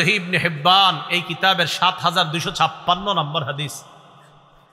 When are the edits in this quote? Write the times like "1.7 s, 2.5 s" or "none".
none